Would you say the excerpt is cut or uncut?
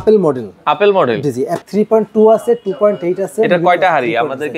cut